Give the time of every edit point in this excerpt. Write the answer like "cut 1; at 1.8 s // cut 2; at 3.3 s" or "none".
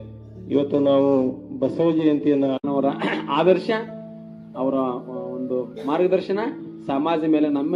cut 1; at 2.6 s

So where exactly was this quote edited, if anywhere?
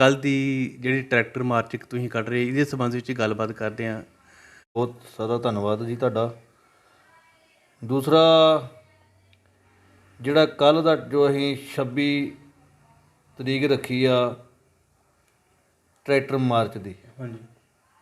cut 1; at 4.8 s

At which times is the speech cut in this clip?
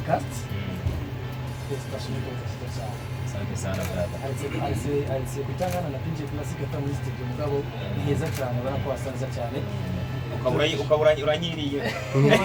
none

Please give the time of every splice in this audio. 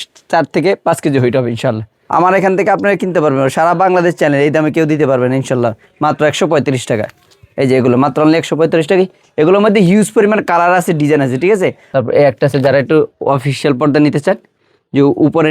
cut 1; at 1.9 s // cut 2; at 11.8 s

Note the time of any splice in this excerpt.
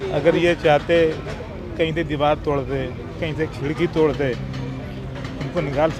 none

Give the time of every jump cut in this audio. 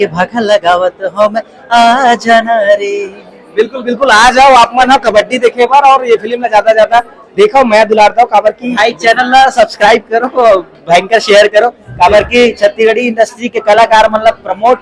none

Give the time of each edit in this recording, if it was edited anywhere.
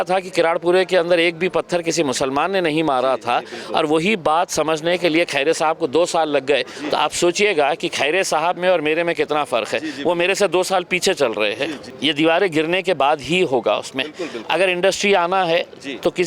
cut 1; at 11.9 s

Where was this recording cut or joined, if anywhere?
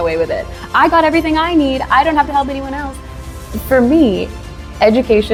none

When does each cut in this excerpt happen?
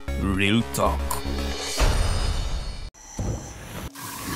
cut 1; at 2.7 s

